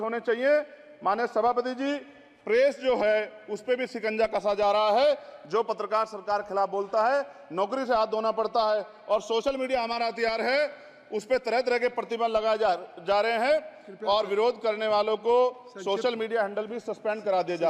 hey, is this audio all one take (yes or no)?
yes